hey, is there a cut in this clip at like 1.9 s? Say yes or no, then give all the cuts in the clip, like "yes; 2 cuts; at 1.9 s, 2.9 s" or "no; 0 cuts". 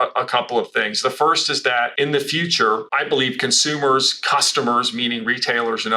yes; 2 cuts; at 1.9 s, 2.9 s